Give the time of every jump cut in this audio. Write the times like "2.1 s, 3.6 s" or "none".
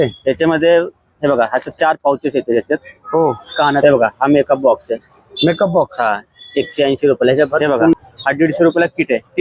3.8 s, 7.9 s

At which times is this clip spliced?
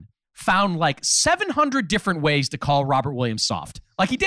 none

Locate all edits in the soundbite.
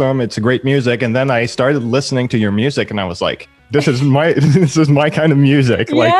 3.5 s

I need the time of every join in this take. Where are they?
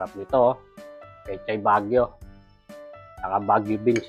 none

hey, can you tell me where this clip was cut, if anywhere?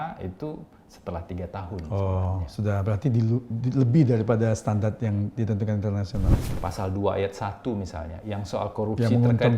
6.4 s

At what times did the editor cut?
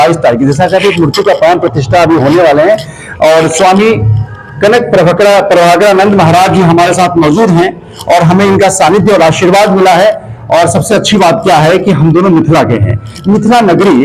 none

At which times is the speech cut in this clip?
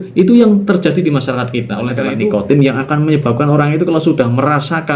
2.0 s

